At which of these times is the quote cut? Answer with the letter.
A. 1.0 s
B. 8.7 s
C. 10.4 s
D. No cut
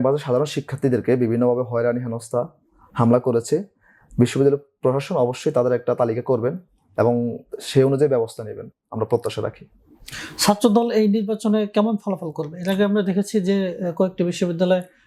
D